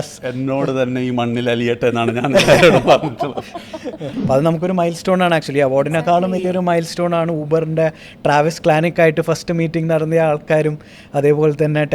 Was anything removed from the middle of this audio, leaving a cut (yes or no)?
yes